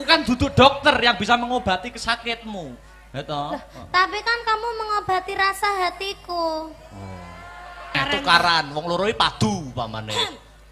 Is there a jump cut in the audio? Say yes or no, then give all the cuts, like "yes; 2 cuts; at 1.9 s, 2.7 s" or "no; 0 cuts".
yes; 1 cut; at 7.9 s